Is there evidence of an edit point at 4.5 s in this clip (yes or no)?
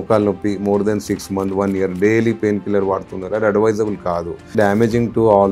yes